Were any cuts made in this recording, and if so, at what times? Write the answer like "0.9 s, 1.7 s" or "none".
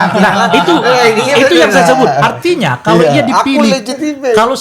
none